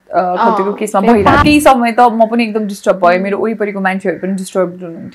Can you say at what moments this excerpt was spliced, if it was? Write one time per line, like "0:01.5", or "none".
0:01.4